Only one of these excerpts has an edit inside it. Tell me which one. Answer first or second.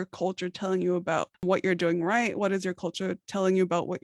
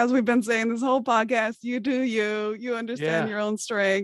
first